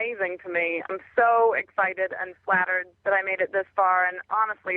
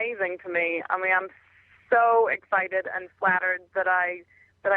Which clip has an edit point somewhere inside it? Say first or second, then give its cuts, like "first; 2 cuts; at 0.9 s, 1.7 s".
first; 2 cuts; at 0.8 s, 2.8 s